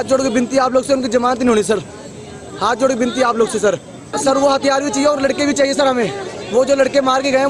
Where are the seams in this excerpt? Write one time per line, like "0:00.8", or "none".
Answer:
0:04.1